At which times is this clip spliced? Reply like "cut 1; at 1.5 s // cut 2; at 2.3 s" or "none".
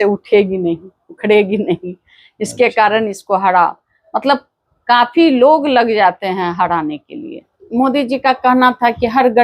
cut 1; at 7.5 s